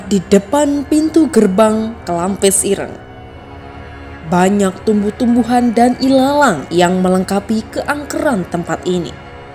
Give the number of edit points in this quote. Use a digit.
0